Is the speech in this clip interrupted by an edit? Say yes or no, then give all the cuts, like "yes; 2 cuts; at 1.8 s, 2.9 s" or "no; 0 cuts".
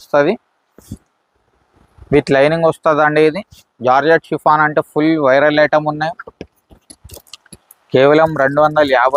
no; 0 cuts